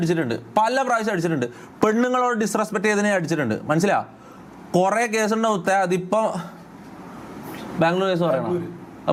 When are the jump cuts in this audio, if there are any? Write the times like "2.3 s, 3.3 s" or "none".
none